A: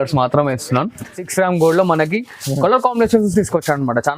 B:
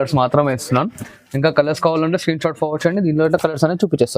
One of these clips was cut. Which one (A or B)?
A